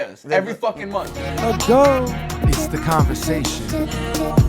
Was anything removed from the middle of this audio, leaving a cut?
yes; 1 cut; at 1.2 s

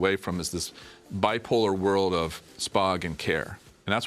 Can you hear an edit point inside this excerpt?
no; 0 cuts

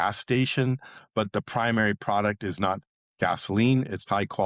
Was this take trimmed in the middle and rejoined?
no; 0 cuts

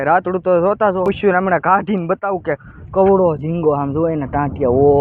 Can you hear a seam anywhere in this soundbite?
yes; 1 cut; at 1.1 s

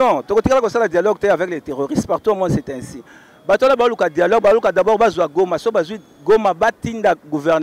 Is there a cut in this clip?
no; 0 cuts

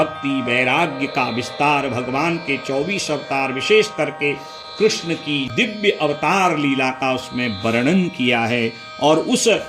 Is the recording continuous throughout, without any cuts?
no; 1 cut; at 5.5 s

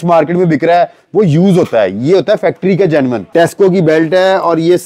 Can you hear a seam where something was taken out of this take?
yes; 1 cut; at 3.3 s

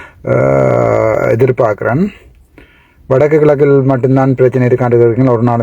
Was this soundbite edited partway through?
no; 0 cuts

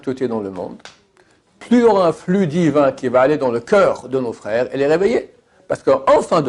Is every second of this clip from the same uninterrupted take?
yes; 0 cuts

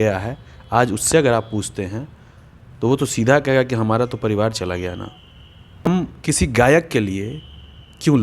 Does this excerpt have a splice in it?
yes; 1 cut; at 5.9 s

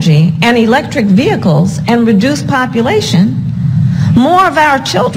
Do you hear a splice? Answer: no; 0 cuts

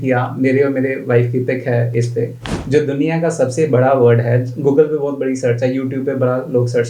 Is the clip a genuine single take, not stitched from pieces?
no; 1 cut; at 2.6 s

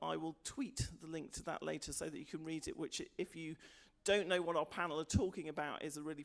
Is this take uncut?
no; 1 cut; at 2.3 s

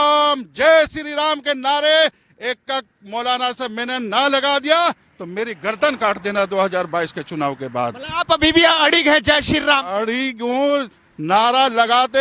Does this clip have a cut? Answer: no; 0 cuts

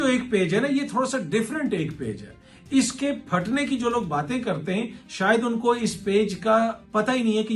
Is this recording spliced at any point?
no; 0 cuts

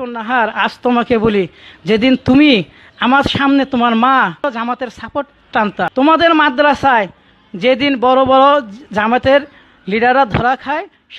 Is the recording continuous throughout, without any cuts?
no; 2 cuts; at 4.4 s, 5.9 s

